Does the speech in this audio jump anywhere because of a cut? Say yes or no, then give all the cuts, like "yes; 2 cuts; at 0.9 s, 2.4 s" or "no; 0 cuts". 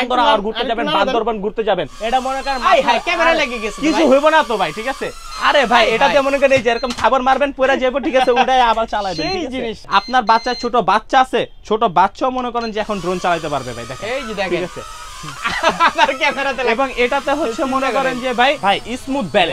yes; 3 cuts; at 1.9 s, 9.8 s, 18.6 s